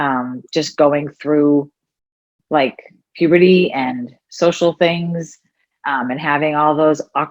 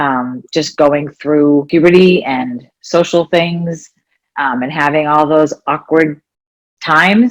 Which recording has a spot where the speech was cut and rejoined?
second; 1 cut; at 1.7 s

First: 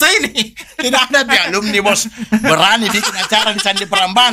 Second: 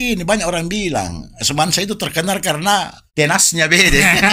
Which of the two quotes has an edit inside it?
second; 1 cut; at 3.0 s

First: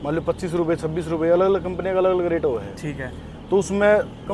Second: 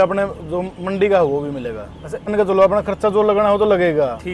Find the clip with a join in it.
second; 1 cut; at 2.3 s

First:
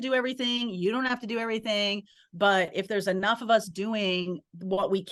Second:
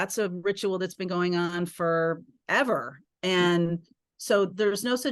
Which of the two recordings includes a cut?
second; 1 cut; at 2.3 s

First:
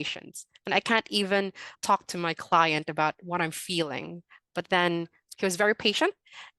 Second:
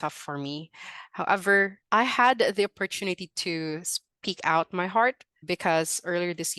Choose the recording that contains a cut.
second; 2 cuts; at 1.8 s, 5.3 s

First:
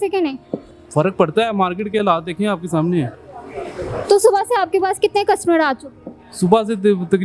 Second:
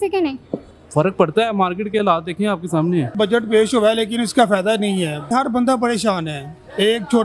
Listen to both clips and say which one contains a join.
second; 2 cuts; at 3.1 s, 5.3 s

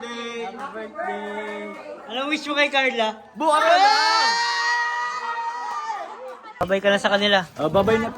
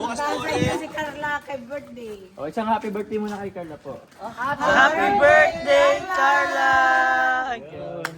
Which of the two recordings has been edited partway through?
first; 1 cut; at 6.4 s

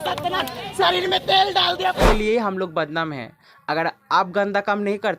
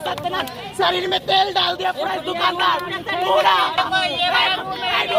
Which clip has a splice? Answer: first; 1 cut; at 2.0 s

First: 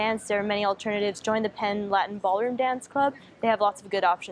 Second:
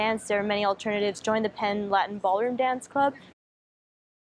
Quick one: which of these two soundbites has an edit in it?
first; 1 cut; at 3.3 s

